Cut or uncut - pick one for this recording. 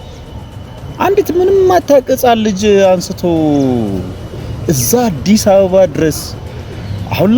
uncut